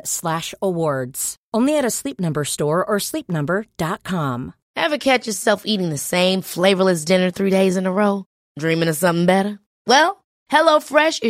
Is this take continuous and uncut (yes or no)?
no